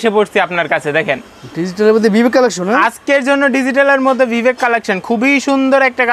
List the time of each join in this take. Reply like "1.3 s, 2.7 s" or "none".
none